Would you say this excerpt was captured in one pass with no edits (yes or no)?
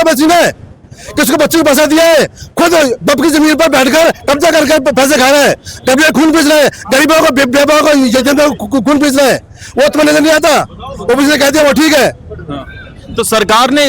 yes